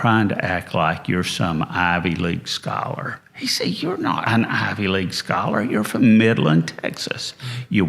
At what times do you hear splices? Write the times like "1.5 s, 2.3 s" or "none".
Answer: 4.2 s